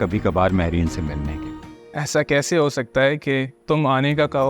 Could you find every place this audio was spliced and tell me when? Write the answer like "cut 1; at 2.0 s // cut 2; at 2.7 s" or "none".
cut 1; at 1.5 s